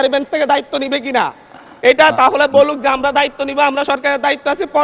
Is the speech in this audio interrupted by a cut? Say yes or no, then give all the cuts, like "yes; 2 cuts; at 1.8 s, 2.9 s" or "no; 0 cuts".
no; 0 cuts